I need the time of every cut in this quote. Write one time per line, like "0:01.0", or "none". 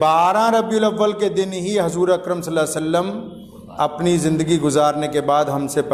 none